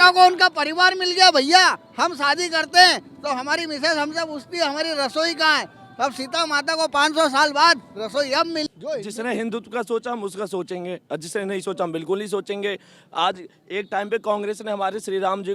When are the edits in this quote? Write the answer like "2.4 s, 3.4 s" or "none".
8.7 s